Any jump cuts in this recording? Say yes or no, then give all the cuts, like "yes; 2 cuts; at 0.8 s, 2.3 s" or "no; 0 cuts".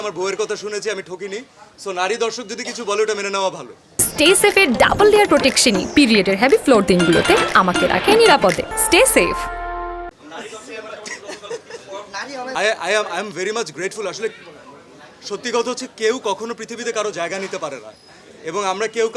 no; 0 cuts